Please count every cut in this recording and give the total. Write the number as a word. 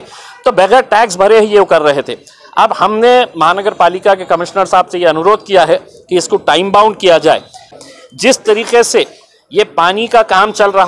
one